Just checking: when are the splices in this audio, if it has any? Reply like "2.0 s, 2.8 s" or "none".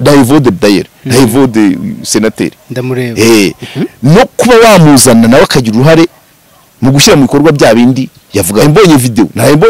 8.6 s